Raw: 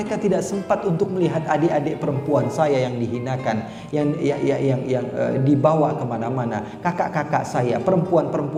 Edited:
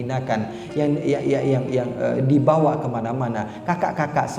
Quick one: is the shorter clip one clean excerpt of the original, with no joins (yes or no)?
yes